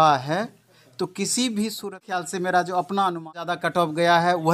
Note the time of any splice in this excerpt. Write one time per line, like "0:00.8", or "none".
0:01.9
0:03.5

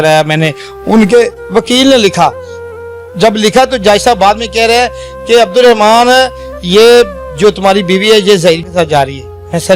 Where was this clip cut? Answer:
0:08.7

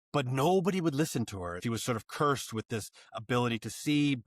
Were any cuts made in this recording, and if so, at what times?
0:01.6

